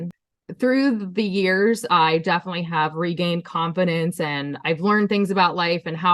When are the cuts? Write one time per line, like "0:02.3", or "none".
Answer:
none